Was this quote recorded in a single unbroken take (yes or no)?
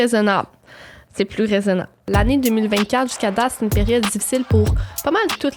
no